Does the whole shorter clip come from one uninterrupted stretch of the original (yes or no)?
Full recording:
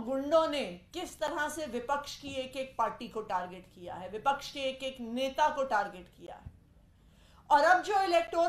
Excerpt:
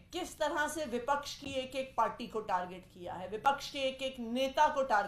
yes